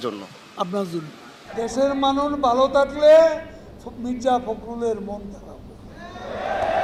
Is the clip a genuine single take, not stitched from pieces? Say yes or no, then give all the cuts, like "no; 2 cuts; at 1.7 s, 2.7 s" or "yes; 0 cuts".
yes; 0 cuts